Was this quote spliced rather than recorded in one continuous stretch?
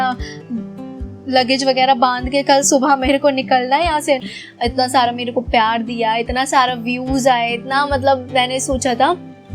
yes; 1 cut; at 4.2 s

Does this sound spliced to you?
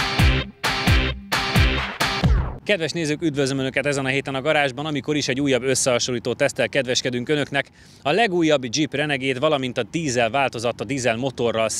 yes; 1 cut; at 2.5 s

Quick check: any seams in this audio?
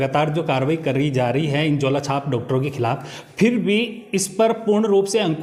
no; 0 cuts

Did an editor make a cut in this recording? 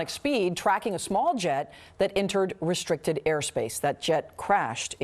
yes; 1 cut; at 3.7 s

